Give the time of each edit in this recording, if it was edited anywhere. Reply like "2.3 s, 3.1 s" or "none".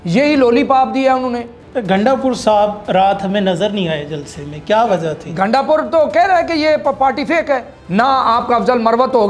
1.6 s, 7.8 s